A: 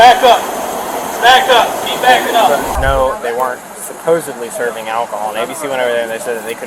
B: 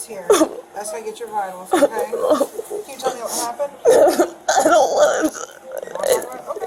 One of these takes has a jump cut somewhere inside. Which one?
A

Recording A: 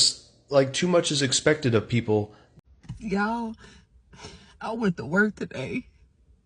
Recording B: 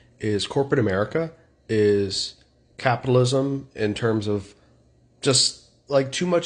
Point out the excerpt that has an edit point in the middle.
A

